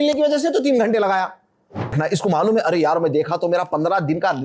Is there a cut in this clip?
yes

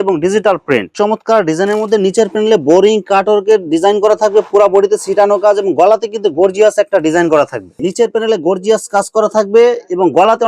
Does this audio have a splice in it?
yes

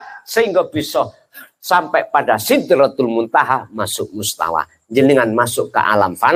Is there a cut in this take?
no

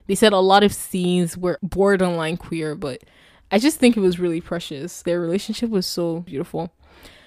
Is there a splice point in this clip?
yes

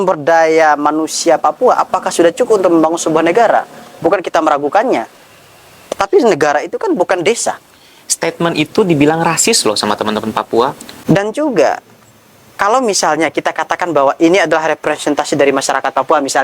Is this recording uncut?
no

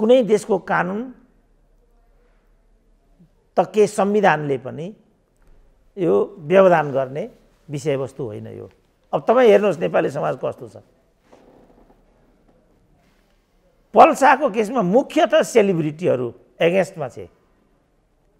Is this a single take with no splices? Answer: yes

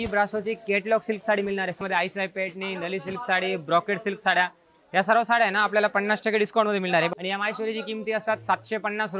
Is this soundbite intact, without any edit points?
no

